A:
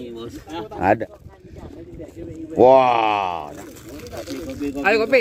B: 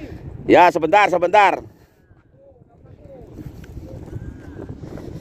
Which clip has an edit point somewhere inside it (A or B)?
A